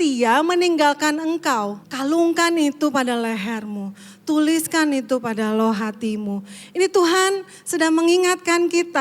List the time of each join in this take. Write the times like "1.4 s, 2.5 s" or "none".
1.8 s